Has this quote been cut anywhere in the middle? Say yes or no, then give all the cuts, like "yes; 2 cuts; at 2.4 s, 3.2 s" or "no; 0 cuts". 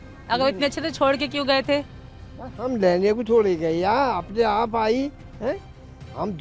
no; 0 cuts